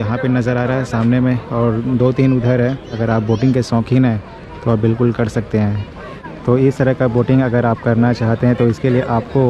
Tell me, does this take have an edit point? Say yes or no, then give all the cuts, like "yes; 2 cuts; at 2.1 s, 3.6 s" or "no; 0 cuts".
yes; 2 cuts; at 2.9 s, 6.2 s